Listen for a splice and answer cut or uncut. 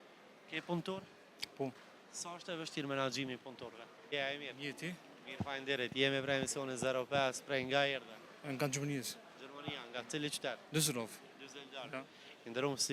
cut